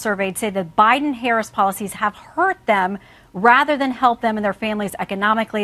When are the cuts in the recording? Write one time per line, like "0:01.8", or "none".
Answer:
none